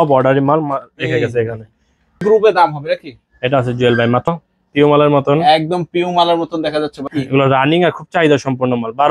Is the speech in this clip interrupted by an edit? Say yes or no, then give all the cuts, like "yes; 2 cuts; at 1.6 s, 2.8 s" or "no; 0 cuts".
yes; 3 cuts; at 2.2 s, 4.3 s, 7.0 s